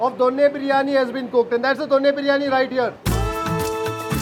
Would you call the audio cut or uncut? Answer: uncut